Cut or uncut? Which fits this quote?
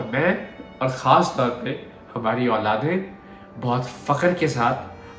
uncut